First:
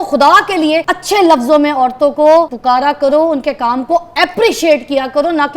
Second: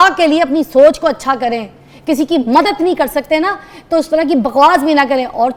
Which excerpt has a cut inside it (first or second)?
first